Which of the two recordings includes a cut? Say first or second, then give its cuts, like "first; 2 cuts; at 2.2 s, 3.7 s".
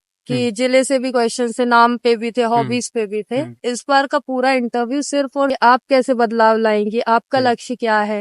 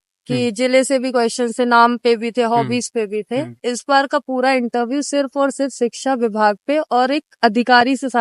first; 1 cut; at 5.5 s